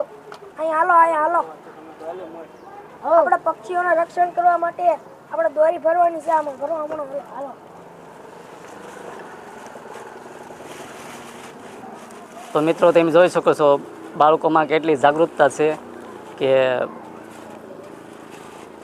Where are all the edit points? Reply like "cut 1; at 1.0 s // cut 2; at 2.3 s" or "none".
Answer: none